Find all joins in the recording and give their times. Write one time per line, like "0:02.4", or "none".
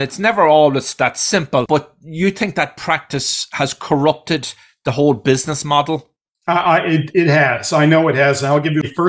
none